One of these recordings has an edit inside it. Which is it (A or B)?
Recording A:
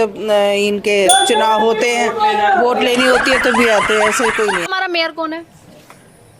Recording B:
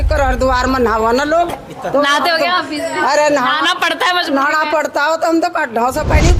A